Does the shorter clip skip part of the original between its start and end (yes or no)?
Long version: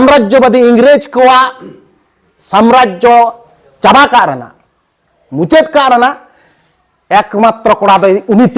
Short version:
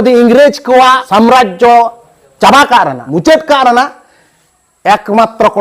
yes